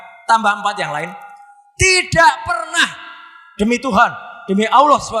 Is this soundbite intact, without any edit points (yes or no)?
yes